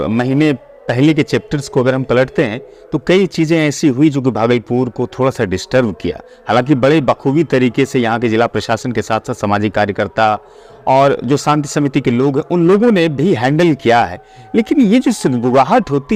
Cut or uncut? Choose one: uncut